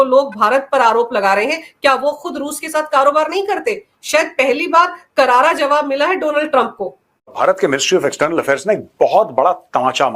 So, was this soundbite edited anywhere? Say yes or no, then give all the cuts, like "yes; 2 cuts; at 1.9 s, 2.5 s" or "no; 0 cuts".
yes; 1 cut; at 7.3 s